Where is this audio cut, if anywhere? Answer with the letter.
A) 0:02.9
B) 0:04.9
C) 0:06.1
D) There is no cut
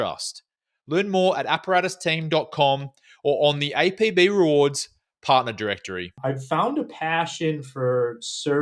C